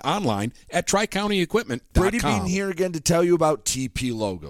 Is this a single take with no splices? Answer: no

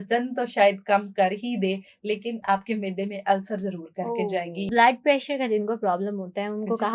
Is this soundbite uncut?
no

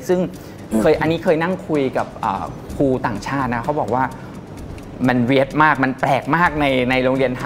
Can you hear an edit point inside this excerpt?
no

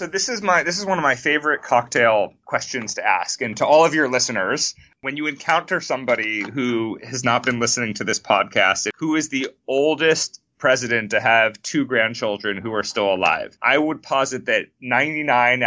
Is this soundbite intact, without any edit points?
no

